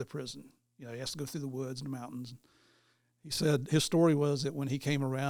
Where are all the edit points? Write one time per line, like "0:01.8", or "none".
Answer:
none